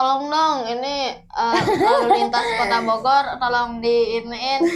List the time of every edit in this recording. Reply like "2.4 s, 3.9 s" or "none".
none